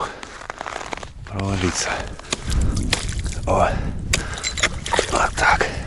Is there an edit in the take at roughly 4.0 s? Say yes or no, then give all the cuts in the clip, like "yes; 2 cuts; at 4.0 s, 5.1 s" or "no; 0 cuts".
no; 1 cut; at 2.1 s